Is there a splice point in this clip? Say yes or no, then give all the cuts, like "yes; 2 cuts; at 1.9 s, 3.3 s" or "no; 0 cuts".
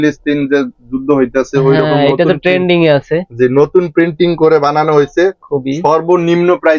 no; 0 cuts